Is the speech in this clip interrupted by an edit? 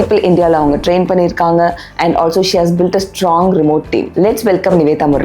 yes; 1 cut; at 4.1 s

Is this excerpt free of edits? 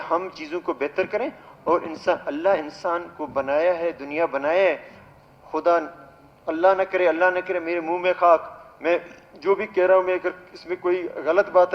yes; 0 cuts

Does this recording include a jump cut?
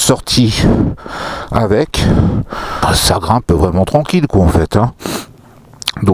yes; 1 cut; at 2.8 s

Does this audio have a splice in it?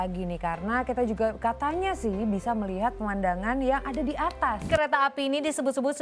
yes; 1 cut; at 4.7 s

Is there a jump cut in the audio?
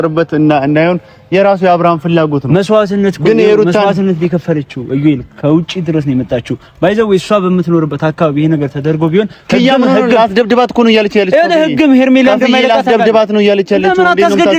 no; 0 cuts

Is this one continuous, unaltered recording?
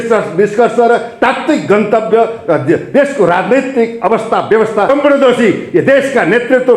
no; 1 cut; at 4.9 s

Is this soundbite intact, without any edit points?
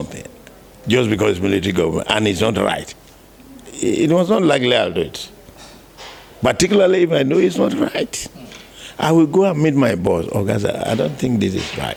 yes; 0 cuts

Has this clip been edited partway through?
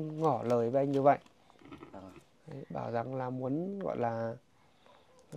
no; 0 cuts

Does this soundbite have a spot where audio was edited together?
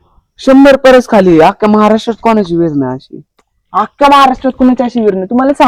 no; 0 cuts

